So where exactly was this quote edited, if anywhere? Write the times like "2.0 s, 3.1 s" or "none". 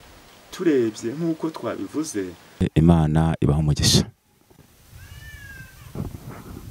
2.6 s